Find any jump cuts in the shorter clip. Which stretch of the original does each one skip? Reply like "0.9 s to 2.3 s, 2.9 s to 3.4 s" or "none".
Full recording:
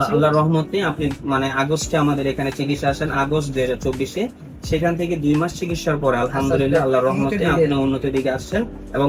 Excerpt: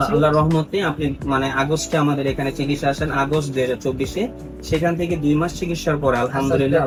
none